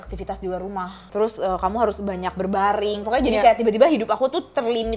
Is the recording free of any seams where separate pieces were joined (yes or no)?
no